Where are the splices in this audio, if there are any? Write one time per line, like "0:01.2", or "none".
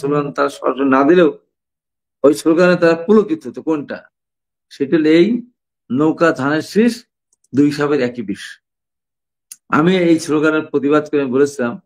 none

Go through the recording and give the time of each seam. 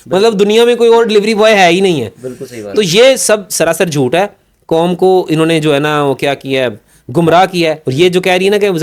0:07.8

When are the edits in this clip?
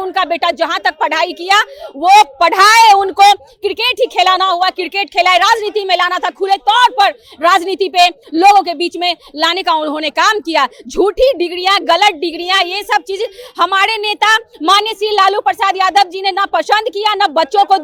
none

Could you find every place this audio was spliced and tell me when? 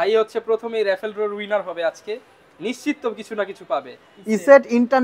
none

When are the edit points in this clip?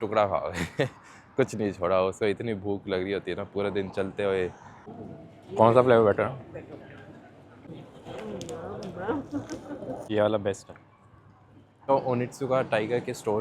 0:04.7
0:07.7
0:10.0
0:11.9

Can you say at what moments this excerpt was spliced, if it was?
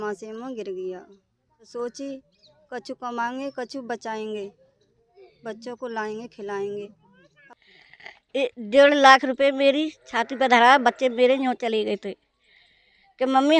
0:01.7
0:07.4

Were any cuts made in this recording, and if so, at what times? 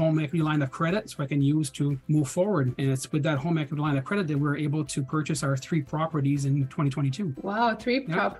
0:02.0
0:02.7
0:07.4

